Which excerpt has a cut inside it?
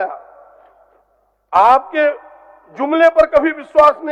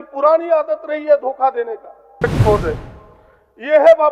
second; 1 cut; at 2.2 s

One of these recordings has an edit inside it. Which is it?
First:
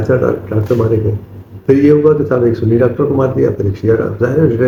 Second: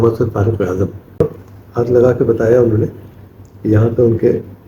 second; 1 cut; at 1.2 s

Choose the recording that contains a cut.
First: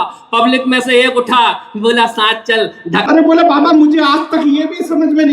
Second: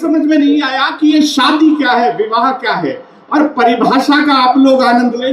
first; 1 cut; at 3.1 s

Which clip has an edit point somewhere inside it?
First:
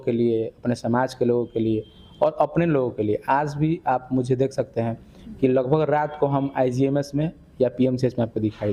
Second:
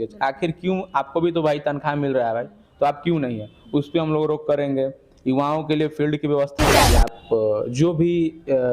second; 1 cut; at 6.8 s

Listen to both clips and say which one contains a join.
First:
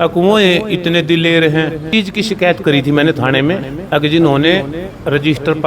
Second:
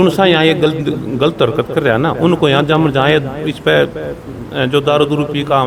first; 1 cut; at 1.9 s

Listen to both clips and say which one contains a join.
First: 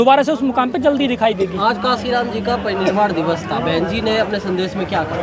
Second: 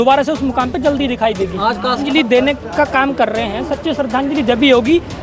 second; 1 cut; at 2.0 s

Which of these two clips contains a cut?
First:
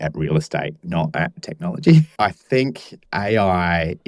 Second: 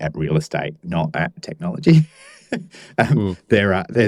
first; 1 cut; at 2.1 s

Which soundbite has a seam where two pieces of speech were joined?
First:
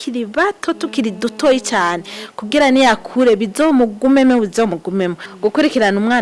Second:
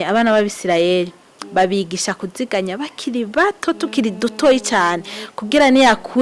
first; 1 cut; at 5.2 s

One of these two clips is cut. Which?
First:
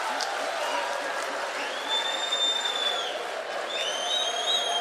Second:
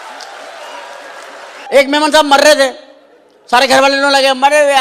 second; 1 cut; at 1.6 s

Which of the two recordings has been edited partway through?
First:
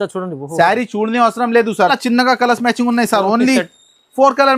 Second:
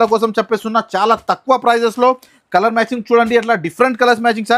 first; 1 cut; at 1.9 s

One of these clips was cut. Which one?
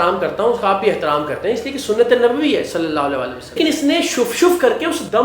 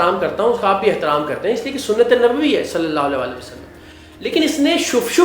first; 1 cut; at 3.4 s

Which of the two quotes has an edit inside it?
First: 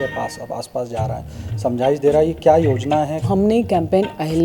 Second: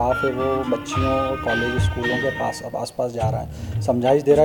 first; 1 cut; at 3.2 s

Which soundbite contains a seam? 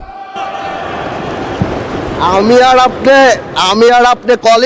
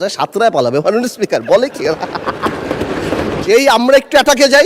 second; 1 cut; at 3.4 s

